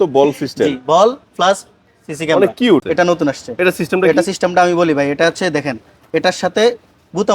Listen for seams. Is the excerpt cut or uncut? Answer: cut